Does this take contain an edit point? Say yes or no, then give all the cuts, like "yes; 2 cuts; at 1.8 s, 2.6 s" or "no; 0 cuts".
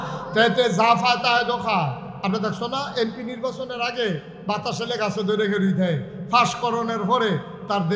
no; 0 cuts